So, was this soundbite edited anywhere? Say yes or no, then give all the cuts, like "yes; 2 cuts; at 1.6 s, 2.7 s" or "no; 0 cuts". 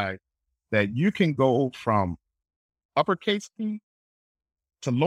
no; 0 cuts